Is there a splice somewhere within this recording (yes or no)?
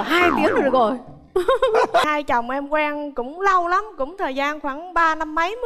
yes